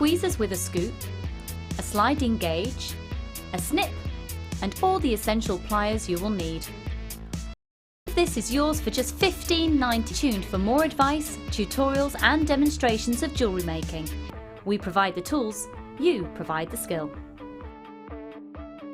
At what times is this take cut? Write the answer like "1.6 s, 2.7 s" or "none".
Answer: 10.1 s